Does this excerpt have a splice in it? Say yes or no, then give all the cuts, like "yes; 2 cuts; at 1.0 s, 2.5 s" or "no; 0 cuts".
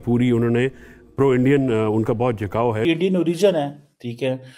yes; 1 cut; at 2.8 s